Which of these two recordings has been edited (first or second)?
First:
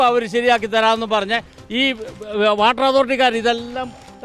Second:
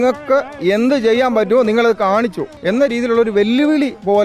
second